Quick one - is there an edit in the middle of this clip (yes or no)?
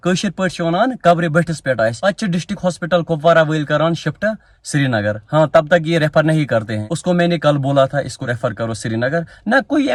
no